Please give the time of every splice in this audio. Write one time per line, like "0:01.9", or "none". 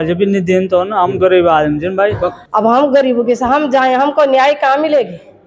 0:02.3